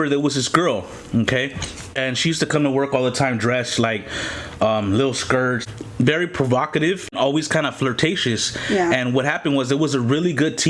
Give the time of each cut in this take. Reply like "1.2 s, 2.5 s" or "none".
2.0 s, 5.6 s, 7.1 s